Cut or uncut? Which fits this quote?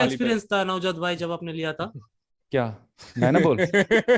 uncut